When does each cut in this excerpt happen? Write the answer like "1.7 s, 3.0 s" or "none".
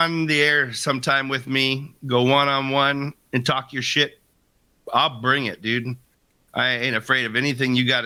none

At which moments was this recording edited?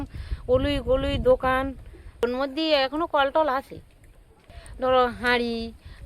2.2 s, 4.4 s

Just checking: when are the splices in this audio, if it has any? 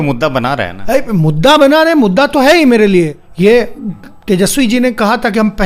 3.2 s

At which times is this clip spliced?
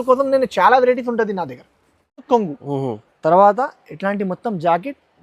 2.2 s

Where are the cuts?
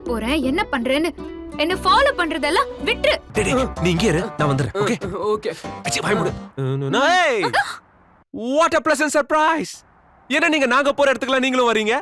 3.2 s, 6.5 s

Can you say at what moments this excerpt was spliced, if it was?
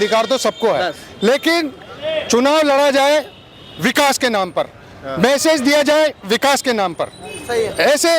none

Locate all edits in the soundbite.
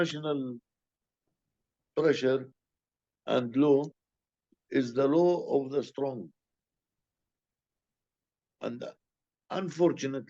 none

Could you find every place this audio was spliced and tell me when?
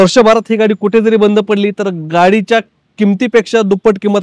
none

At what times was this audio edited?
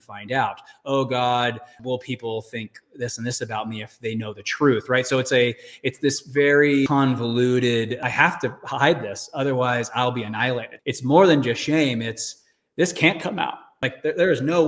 1.7 s, 6.9 s, 8.0 s, 10.7 s, 13.8 s

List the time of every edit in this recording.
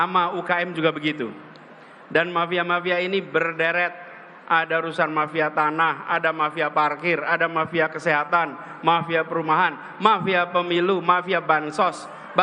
none

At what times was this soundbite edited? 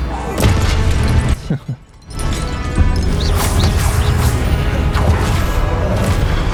none

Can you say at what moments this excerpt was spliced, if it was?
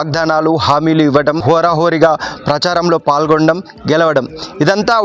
1.4 s

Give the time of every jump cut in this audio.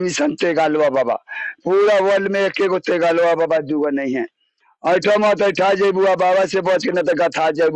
none

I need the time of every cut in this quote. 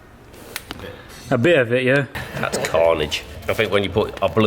2.1 s, 3.3 s

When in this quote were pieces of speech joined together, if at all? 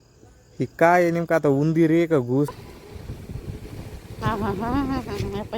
2.5 s

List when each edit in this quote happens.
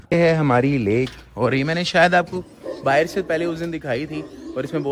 none

